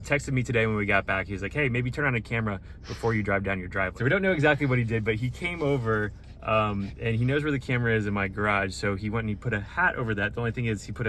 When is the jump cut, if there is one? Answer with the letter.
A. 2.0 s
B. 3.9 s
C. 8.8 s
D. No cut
B